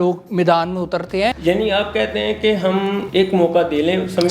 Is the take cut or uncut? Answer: cut